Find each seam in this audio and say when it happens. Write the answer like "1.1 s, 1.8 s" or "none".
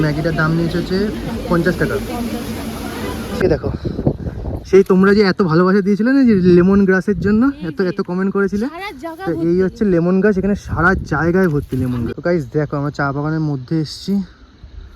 3.4 s, 12.2 s